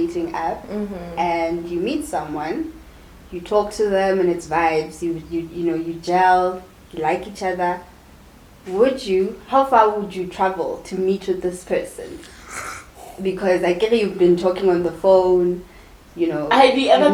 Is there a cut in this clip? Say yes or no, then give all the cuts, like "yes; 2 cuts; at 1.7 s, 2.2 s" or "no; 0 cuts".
no; 0 cuts